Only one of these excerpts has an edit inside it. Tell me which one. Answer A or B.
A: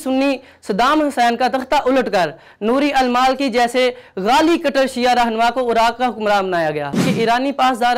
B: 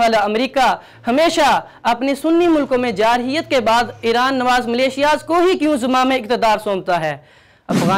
A